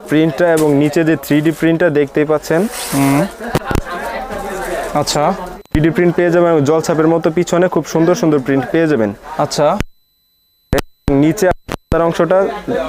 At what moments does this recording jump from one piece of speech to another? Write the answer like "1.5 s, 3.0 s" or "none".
none